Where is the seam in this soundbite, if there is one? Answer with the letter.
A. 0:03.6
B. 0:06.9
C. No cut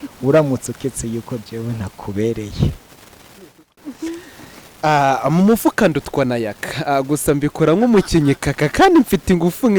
A